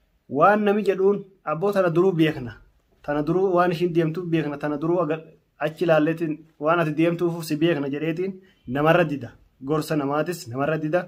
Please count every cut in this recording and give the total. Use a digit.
0